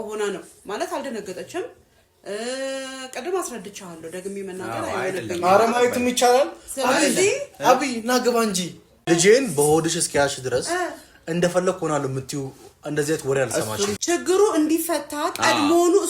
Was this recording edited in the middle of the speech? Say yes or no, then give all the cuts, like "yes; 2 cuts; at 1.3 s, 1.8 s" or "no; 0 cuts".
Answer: yes; 2 cuts; at 8.9 s, 14.0 s